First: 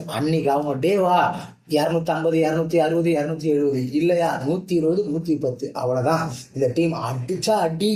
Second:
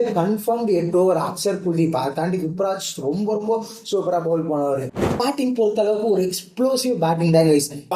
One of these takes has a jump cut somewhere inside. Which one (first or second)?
second